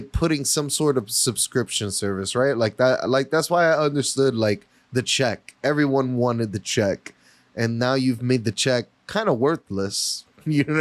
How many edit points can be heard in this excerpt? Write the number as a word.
zero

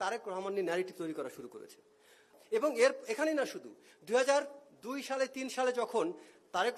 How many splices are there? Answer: one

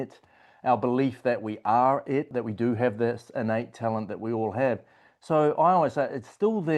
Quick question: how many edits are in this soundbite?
one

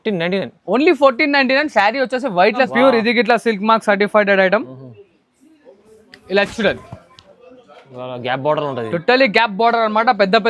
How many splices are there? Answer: one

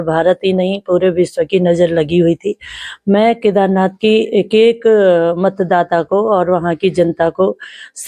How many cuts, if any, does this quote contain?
zero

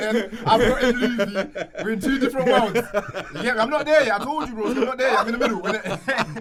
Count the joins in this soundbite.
zero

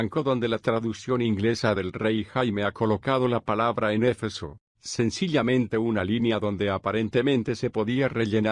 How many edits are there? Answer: one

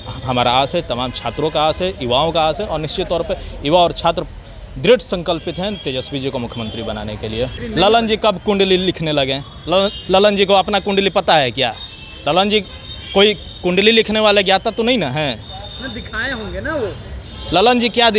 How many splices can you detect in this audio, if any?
one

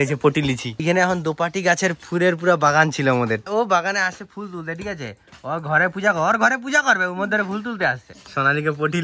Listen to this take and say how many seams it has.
three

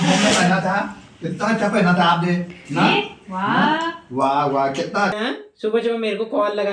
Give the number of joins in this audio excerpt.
one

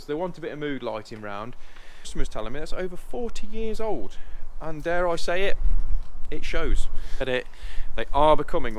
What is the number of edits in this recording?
two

